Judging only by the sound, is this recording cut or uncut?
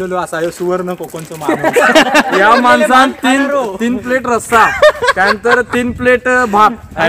cut